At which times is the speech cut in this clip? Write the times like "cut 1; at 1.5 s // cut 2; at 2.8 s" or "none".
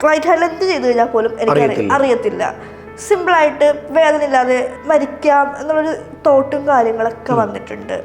cut 1; at 4.7 s